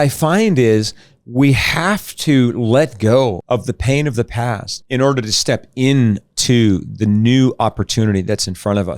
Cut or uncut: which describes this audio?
cut